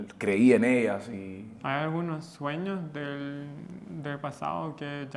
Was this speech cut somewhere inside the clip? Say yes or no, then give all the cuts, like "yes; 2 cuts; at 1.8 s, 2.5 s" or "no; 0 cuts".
no; 0 cuts